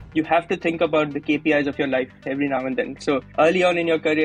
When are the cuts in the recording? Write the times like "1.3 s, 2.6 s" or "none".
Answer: 1.1 s, 3.0 s